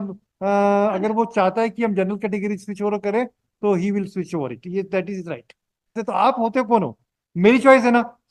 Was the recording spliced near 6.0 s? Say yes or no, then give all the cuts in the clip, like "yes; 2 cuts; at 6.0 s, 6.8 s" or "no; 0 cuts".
yes; 1 cut; at 6.0 s